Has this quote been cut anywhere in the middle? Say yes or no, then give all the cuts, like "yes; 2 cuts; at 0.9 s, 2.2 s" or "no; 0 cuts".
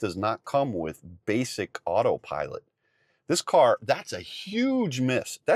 no; 0 cuts